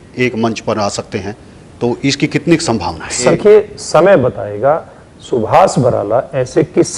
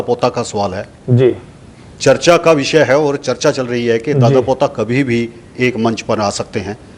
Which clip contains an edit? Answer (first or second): first